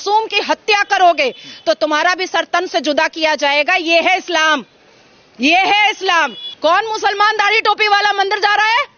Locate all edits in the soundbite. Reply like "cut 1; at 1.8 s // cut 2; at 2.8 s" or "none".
cut 1; at 6.4 s